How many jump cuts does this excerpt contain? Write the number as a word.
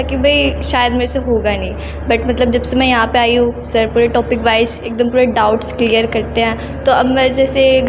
zero